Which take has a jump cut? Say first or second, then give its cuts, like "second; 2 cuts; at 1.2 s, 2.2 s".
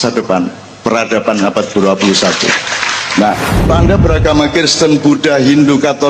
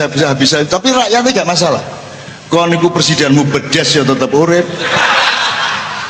first; 1 cut; at 3.7 s